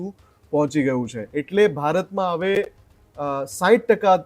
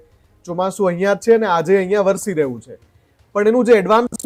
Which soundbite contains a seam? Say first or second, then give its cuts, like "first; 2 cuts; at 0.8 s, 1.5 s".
first; 1 cut; at 1.2 s